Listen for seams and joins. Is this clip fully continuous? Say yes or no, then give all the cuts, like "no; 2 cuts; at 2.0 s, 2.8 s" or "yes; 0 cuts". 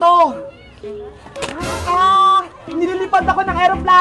yes; 0 cuts